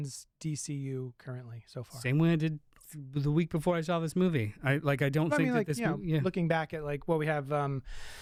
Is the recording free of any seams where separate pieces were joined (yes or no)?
yes